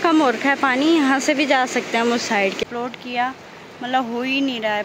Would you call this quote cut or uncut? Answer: cut